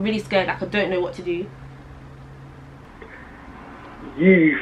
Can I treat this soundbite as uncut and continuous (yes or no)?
no